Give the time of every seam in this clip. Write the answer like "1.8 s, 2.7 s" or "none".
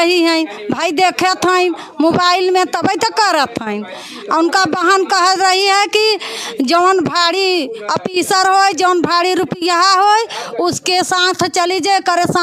none

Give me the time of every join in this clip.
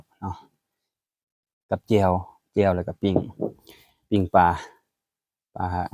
none

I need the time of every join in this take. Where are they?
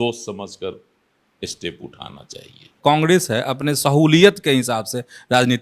2.8 s

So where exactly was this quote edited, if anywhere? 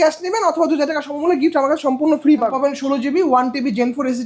2.5 s

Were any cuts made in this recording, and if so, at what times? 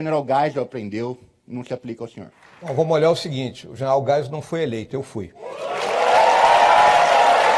2.4 s, 5.4 s

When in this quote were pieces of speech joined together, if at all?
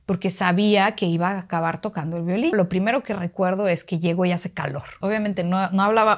2.5 s, 4.9 s

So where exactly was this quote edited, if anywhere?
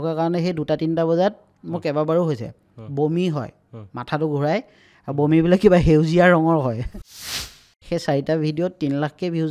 7.3 s

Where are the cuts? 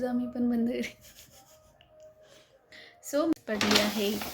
3.3 s

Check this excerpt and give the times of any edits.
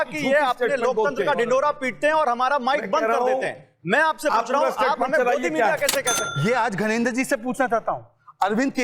6.2 s

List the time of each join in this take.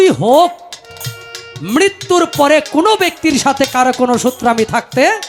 none

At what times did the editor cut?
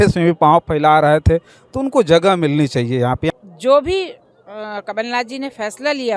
3.3 s

